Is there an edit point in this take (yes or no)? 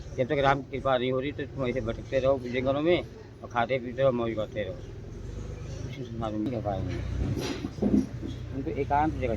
yes